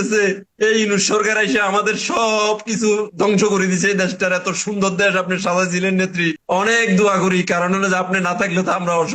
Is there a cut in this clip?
yes; 1 cut; at 6.4 s

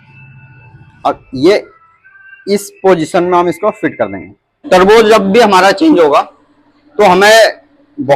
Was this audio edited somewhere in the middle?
yes; 1 cut; at 4.6 s

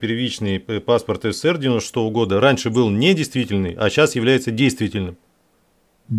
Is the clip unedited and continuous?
yes; 0 cuts

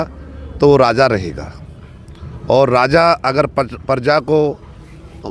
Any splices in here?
no; 0 cuts

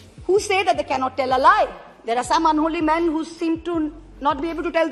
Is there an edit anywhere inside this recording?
no; 0 cuts

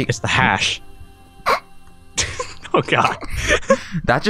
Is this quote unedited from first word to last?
yes; 0 cuts

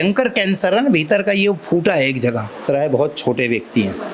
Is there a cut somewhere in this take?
yes; 1 cut; at 2.7 s

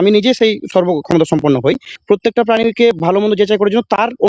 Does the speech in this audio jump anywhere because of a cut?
yes; 1 cut; at 1.9 s

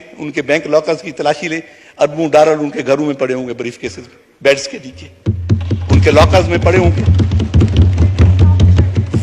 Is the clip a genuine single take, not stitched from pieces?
yes; 0 cuts

